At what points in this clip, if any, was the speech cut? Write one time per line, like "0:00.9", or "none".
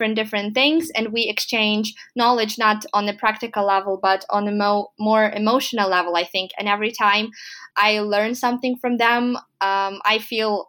0:07.5

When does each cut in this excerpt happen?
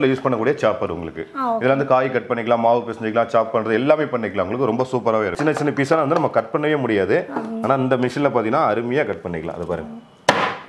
0:01.5
0:05.3

